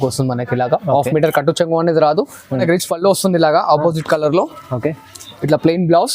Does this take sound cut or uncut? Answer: cut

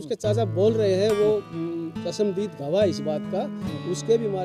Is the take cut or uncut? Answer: uncut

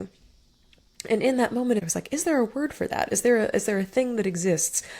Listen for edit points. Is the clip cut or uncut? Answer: cut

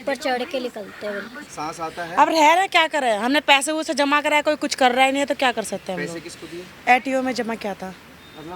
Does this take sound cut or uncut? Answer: cut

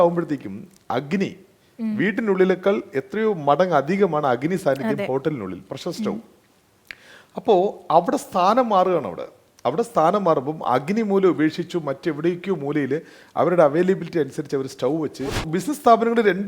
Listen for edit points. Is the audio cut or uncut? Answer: cut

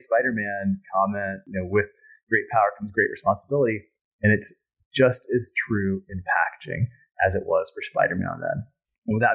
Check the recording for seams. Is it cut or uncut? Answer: cut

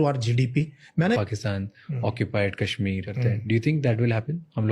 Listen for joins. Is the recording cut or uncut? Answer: cut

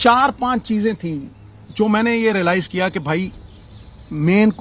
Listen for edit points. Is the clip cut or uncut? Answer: uncut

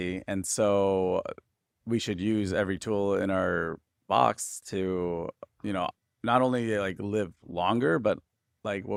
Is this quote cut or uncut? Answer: uncut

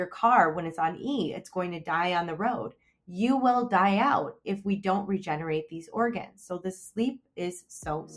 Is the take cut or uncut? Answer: uncut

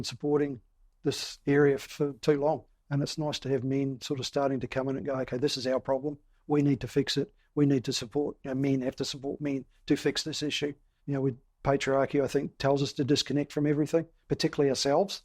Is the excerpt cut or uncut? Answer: cut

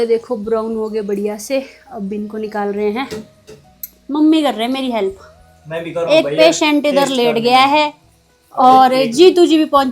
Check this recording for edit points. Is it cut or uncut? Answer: uncut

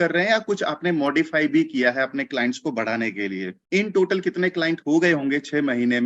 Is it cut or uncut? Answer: cut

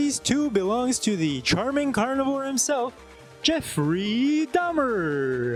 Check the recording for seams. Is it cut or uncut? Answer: uncut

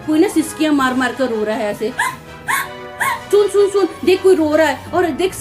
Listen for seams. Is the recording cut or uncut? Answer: cut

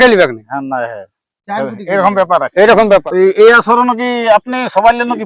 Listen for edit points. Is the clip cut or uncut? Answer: cut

